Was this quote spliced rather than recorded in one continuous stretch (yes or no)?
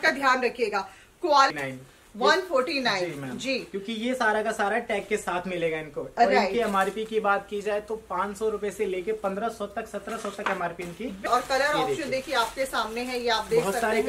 yes